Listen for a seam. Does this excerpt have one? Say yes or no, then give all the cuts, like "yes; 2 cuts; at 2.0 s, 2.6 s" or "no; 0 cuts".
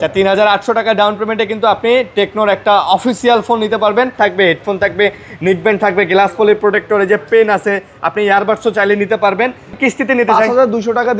yes; 2 cuts; at 4.1 s, 9.7 s